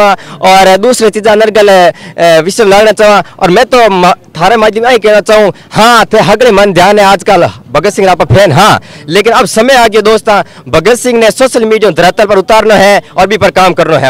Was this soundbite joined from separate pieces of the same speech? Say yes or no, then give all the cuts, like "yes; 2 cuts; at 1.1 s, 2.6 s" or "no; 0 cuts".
no; 0 cuts